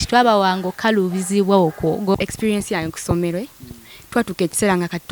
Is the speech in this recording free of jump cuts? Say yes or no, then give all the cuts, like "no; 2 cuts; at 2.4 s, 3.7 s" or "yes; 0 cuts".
no; 1 cut; at 2.2 s